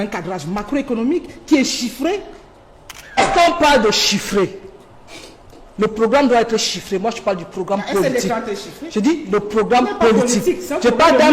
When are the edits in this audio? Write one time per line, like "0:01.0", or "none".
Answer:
0:03.2